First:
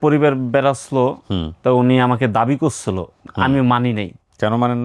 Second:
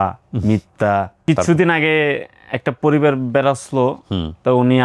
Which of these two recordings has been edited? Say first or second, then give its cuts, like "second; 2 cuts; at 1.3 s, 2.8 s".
second; 1 cut; at 1.2 s